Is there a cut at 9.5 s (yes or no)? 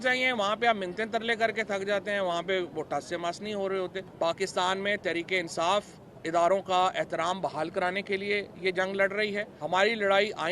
yes